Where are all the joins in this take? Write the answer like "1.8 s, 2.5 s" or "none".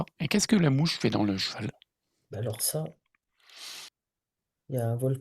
3.9 s